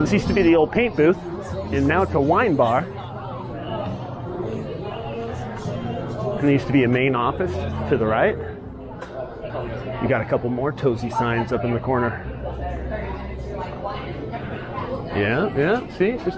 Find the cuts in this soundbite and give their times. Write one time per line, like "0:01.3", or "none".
0:09.4